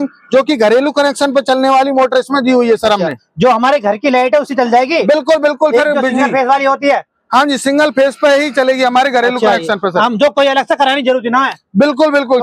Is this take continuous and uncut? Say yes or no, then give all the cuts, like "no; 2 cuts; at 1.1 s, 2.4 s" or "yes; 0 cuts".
yes; 0 cuts